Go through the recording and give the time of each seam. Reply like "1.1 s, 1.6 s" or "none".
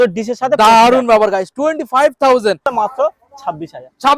2.7 s